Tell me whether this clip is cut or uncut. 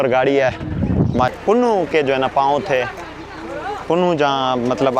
cut